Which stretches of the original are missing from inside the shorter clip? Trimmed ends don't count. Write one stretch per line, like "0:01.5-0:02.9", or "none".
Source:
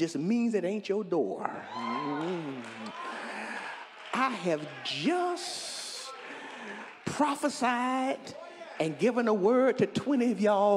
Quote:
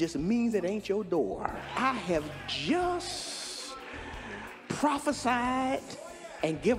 0:01.6-0:04.0